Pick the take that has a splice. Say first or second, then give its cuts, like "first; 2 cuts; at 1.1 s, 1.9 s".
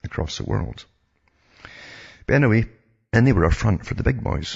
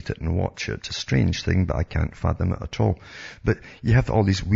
second; 1 cut; at 1.4 s